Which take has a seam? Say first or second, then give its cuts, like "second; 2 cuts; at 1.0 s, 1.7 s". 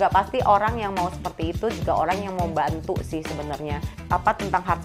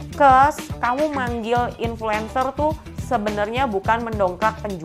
first; 1 cut; at 3.9 s